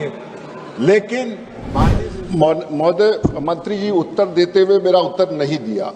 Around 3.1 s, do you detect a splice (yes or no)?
no